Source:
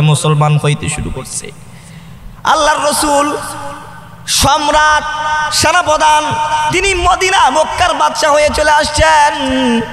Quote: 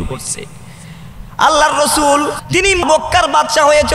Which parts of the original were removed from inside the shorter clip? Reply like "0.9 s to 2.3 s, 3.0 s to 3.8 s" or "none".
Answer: 3.9 s to 7.5 s

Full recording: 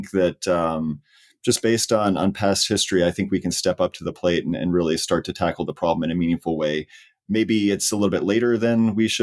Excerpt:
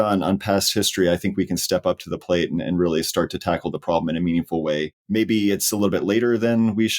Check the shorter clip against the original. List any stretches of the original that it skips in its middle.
6.9 s to 7.2 s

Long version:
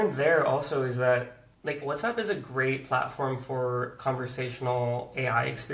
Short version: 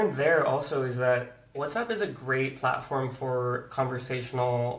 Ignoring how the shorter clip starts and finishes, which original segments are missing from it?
1.5 s to 1.8 s

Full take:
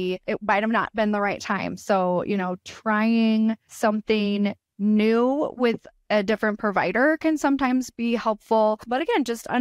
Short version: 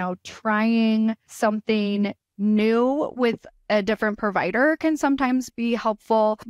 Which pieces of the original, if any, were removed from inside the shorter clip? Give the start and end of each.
none

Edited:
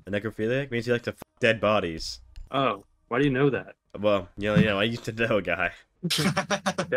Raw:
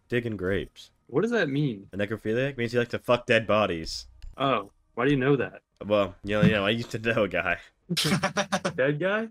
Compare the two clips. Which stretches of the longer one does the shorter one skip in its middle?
none

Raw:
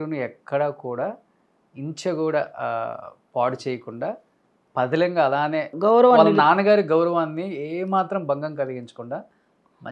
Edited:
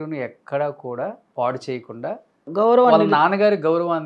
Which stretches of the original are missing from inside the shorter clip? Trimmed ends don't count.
1.2 s to 3.2 s, 4.4 s to 5.7 s

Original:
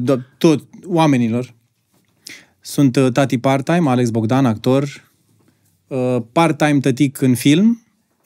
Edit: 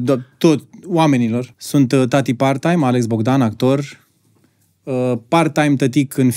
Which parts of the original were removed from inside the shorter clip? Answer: 1.6 s to 2.6 s

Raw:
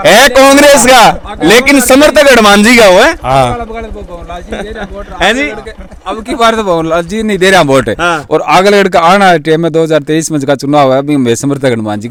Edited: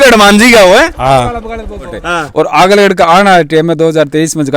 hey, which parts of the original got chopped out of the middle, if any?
4.3 s to 8.0 s

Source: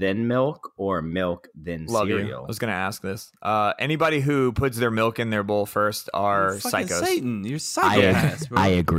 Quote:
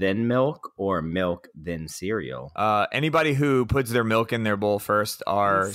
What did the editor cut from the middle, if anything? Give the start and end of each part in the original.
1.9 s to 2.8 s

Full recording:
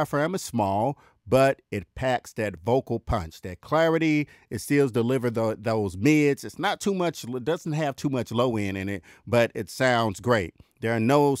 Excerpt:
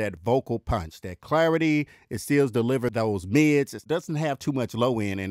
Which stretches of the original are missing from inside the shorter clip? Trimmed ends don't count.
5.3 s to 5.6 s, 6.5 s to 7.3 s

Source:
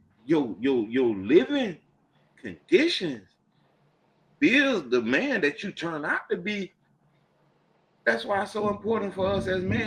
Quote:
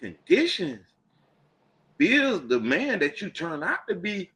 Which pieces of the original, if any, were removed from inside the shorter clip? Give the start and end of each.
none

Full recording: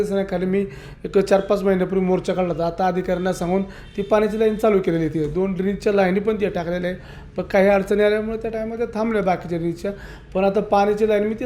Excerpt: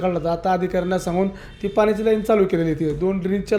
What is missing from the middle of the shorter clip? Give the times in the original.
none

